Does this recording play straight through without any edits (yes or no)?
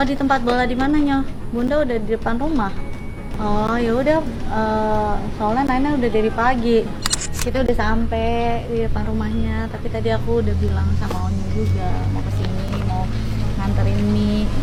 yes